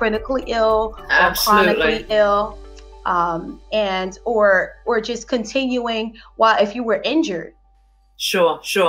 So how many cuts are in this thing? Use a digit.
0